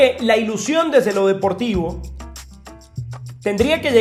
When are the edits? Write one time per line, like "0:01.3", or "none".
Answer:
none